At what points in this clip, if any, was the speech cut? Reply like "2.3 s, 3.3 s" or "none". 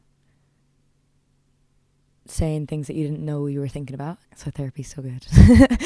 4.3 s